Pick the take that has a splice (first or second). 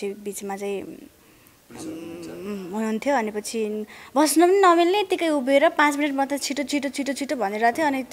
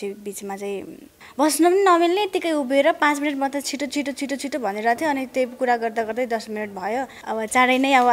second